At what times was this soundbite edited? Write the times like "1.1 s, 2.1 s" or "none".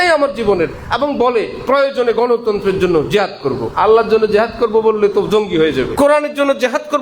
3.7 s, 5.9 s